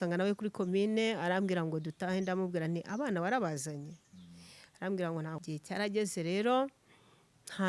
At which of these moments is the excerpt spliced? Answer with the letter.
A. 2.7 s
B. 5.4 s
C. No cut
B